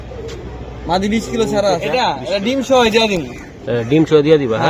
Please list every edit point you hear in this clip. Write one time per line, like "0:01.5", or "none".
0:01.9